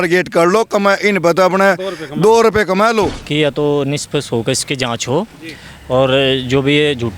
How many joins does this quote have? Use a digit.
1